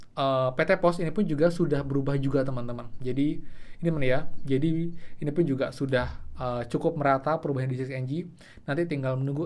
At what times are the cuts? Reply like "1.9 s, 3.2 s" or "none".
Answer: none